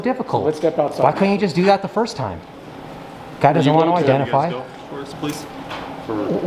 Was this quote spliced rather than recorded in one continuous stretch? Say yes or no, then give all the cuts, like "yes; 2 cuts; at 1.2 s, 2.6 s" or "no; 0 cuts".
no; 0 cuts